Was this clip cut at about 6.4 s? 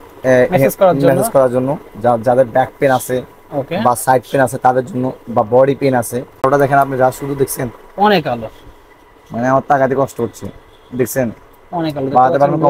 yes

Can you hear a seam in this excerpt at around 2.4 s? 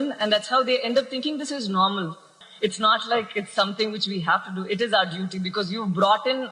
yes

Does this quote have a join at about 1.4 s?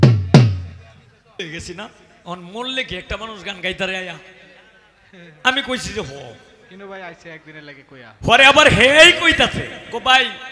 yes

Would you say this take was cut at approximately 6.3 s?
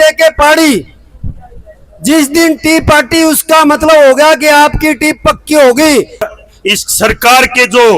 yes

